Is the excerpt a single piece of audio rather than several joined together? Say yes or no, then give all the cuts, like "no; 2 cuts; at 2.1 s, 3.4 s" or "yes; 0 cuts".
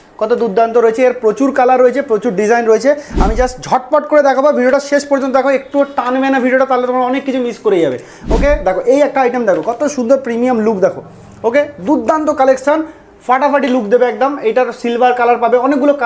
yes; 0 cuts